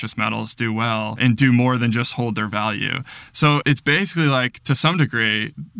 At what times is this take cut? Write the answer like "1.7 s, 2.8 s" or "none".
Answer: 1.2 s, 3.6 s